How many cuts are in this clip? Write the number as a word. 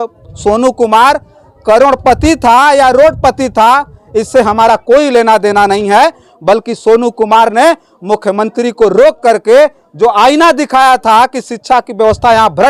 zero